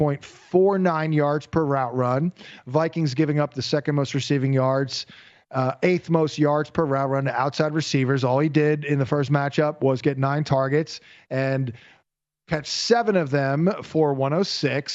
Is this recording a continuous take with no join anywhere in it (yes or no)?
yes